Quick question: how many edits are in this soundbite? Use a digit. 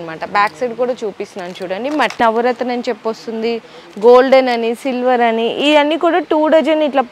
1